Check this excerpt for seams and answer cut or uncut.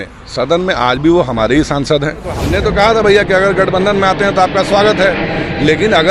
cut